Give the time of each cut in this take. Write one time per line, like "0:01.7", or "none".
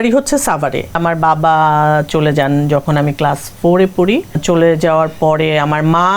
0:01.0
0:04.4